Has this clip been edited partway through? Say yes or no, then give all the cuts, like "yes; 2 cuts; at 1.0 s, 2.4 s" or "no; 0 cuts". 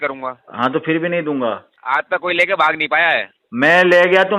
yes; 1 cut; at 1.7 s